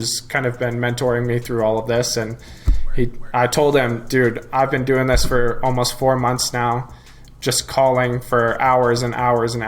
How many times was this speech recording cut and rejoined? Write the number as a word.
zero